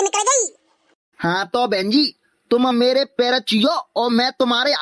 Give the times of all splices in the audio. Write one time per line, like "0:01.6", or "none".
none

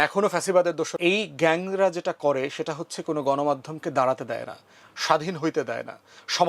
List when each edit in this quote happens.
0:00.9

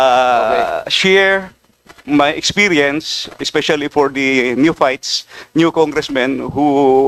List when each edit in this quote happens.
none

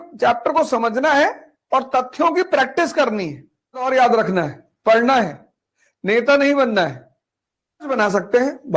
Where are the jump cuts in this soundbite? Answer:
0:03.9
0:07.9

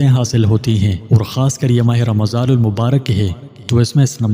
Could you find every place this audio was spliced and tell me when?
0:01.0

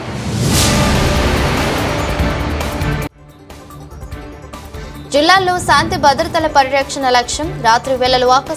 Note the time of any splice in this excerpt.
none

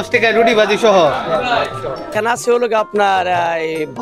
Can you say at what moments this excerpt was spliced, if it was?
0:02.1

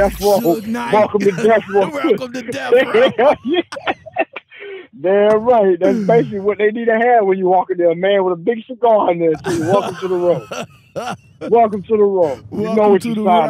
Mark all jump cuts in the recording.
none

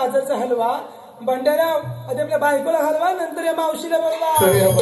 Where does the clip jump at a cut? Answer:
none

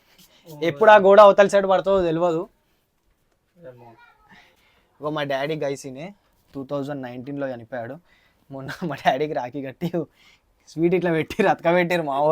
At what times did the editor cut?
0:04.6

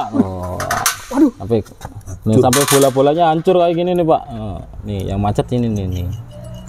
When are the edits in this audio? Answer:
none

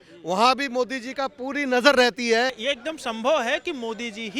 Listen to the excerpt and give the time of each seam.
0:02.6

